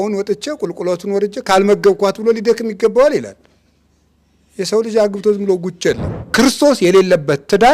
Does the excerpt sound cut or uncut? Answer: cut